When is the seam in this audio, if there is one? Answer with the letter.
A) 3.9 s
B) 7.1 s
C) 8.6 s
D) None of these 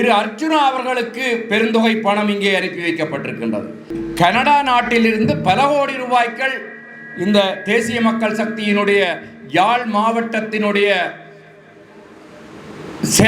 A